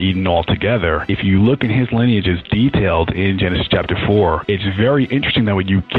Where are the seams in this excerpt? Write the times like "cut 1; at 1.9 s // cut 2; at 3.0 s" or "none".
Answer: cut 1; at 1.1 s // cut 2; at 4.4 s